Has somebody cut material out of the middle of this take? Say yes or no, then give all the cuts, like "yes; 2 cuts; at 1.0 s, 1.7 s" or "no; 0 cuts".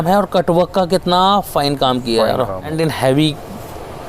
yes; 1 cut; at 2.7 s